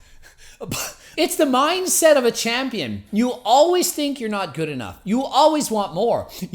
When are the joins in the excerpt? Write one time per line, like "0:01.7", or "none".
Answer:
0:01.0